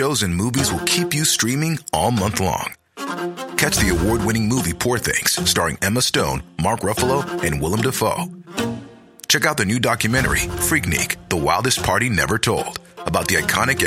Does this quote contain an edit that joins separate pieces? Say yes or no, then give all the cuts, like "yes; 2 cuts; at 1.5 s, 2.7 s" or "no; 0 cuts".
no; 0 cuts